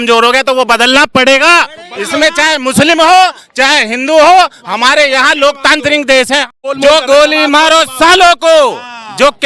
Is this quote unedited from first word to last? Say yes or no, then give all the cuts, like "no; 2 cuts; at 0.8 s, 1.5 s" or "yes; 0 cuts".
no; 1 cut; at 6.5 s